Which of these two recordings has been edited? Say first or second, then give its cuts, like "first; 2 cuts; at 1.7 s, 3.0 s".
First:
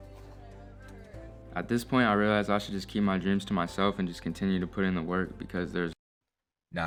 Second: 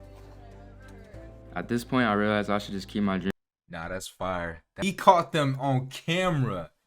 second; 2 cuts; at 3.3 s, 4.7 s